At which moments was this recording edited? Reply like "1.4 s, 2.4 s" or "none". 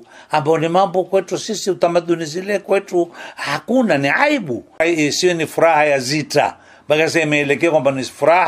4.8 s